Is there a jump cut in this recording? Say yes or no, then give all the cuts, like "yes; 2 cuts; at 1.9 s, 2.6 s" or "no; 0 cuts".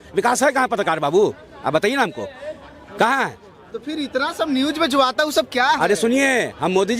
no; 0 cuts